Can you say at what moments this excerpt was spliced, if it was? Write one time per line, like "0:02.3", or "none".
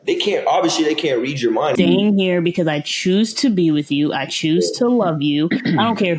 0:01.7